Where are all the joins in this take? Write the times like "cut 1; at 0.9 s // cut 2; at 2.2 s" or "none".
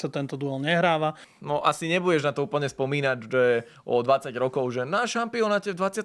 cut 1; at 1.3 s